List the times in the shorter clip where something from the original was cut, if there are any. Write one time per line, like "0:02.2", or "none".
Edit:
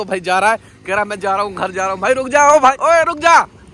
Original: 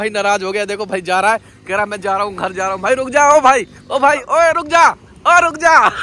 0:02.8